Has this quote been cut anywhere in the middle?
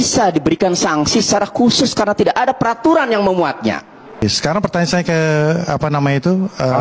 yes; 1 cut; at 4.2 s

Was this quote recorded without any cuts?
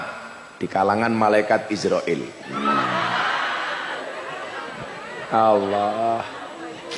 no; 1 cut; at 3.9 s

